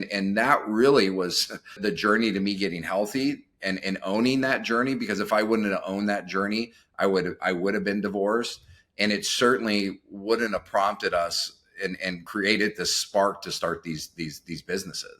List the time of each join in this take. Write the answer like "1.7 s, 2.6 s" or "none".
1.8 s, 12.2 s